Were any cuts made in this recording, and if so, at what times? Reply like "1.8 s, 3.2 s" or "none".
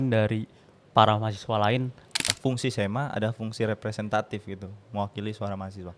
2.3 s